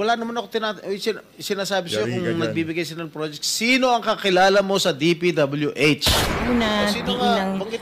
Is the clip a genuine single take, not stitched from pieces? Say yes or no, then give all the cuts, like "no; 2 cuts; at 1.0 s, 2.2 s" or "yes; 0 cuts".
no; 1 cut; at 6.3 s